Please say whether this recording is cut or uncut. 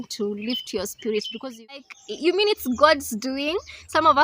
cut